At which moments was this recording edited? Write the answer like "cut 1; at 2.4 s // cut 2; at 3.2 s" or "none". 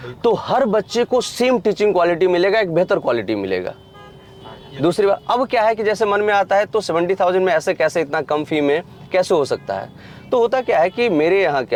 none